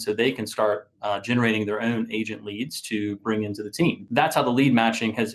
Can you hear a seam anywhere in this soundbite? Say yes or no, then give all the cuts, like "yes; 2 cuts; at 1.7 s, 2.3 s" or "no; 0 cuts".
yes; 1 cut; at 4.1 s